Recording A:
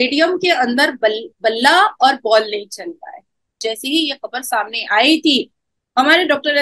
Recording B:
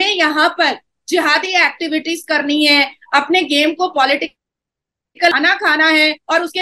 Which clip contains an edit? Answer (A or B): A